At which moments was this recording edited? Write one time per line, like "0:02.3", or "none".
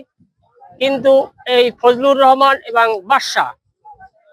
none